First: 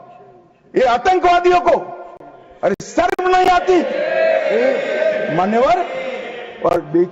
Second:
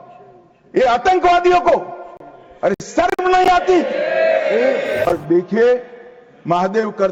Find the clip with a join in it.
second; 1 cut; at 5.1 s

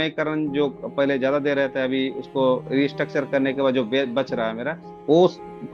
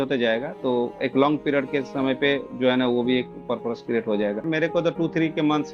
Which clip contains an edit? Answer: second; 1 cut; at 4.4 s

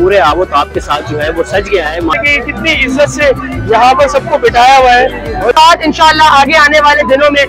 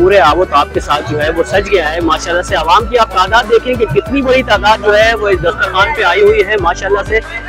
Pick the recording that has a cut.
first; 2 cuts; at 2.2 s, 5.5 s

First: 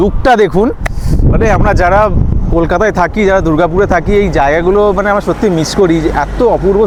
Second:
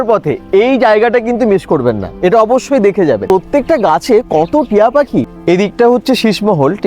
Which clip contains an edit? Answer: second; 2 cuts; at 3.2 s, 5.3 s

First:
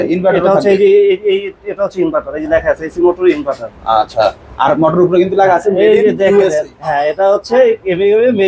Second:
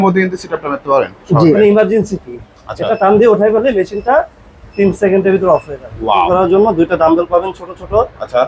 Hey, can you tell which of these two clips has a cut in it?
second; 2 cuts; at 1.5 s, 6.1 s

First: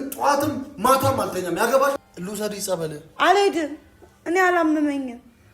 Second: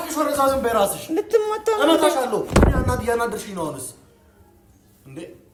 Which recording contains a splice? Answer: first; 1 cut; at 2.1 s

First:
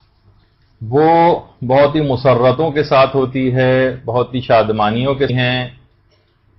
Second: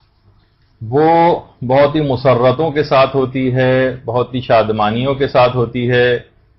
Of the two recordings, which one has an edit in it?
second; 1 cut; at 5.3 s

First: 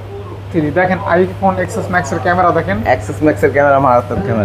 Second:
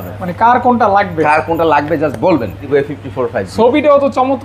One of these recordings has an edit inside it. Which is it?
second; 1 cut; at 2.6 s

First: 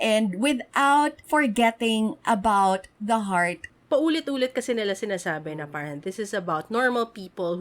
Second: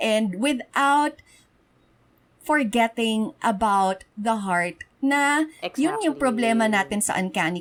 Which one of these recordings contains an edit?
first; 2 cuts; at 1.2 s, 3.7 s

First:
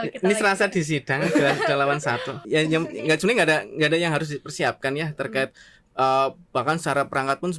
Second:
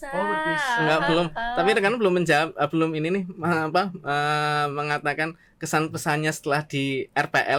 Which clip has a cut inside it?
first; 1 cut; at 2.4 s

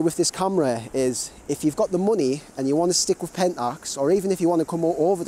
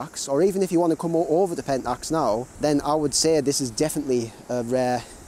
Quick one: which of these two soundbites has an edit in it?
second; 1 cut; at 2.5 s

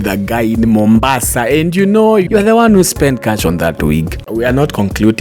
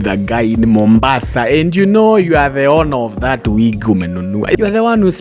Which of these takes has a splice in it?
first; 2 cuts; at 2.3 s, 4.2 s

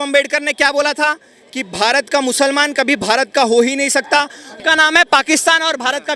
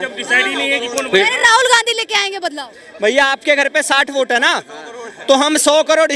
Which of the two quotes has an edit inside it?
first; 1 cut; at 4.5 s

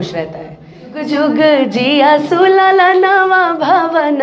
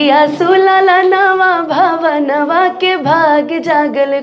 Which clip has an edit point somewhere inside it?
first; 1 cut; at 1.0 s

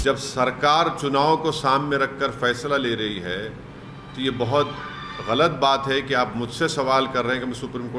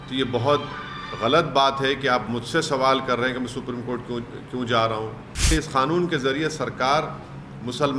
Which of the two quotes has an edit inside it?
second; 1 cut; at 5.5 s

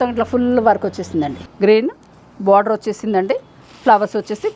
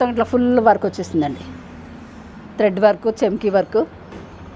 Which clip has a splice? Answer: first; 1 cut; at 1.4 s

